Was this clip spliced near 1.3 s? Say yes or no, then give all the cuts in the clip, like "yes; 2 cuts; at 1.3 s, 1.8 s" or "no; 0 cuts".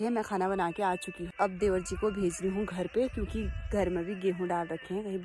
yes; 1 cut; at 1.3 s